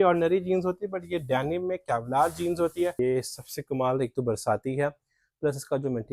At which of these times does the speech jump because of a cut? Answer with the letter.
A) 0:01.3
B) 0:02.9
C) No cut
B